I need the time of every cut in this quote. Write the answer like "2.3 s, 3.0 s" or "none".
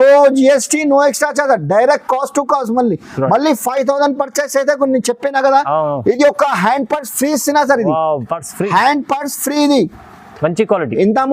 none